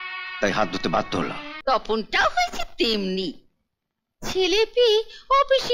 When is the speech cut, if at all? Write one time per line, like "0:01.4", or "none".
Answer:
0:01.5